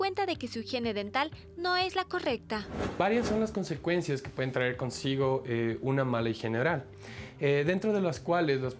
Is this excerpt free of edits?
no; 1 cut; at 2.8 s

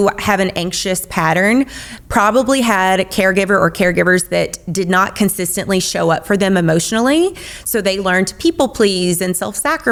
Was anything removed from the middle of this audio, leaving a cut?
no; 0 cuts

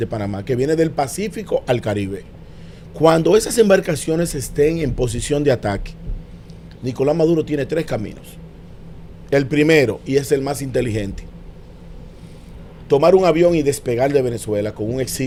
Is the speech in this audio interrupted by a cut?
no; 0 cuts

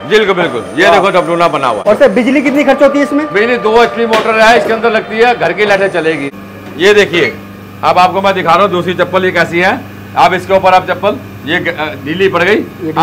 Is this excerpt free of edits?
no; 2 cuts; at 1.8 s, 6.3 s

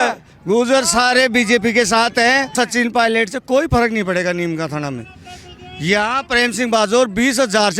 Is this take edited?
yes; 1 cut; at 2.5 s

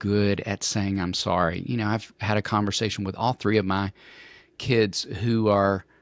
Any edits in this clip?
no; 0 cuts

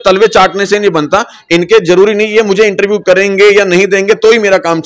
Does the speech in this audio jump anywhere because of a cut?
no; 0 cuts

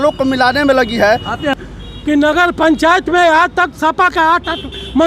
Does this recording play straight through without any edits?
no; 1 cut; at 1.6 s

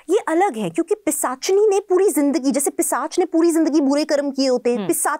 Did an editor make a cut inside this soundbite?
no; 0 cuts

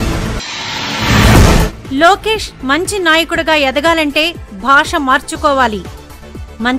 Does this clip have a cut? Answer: yes; 1 cut; at 1.4 s

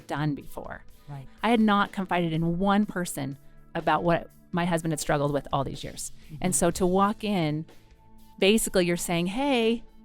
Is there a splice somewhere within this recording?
yes; 1 cut; at 1.1 s

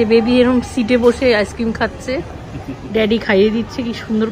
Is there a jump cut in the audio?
no; 0 cuts

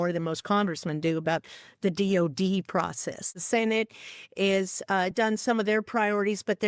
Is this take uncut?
no; 1 cut; at 3.3 s

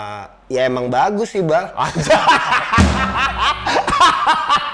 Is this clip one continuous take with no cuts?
yes; 0 cuts

